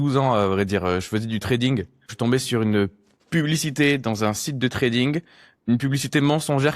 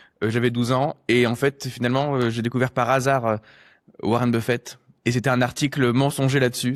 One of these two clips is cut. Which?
first; 1 cut; at 2.1 s

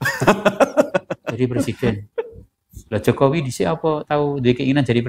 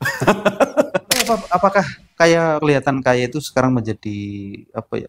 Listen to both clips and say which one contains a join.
second; 1 cut; at 1.2 s

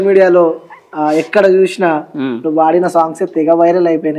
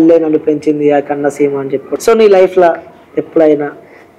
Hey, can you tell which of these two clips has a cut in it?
second; 1 cut; at 1.9 s

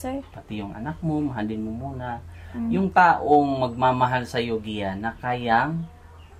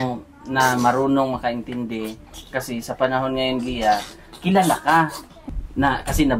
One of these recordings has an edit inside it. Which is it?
second; 1 cut; at 5.3 s

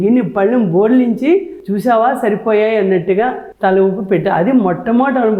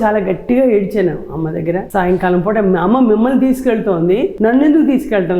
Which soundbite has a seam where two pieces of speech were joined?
second; 2 cuts; at 1.8 s, 4.3 s

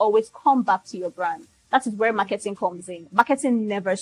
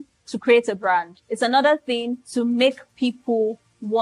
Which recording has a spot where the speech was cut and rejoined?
second; 2 cuts; at 1.2 s, 2.2 s

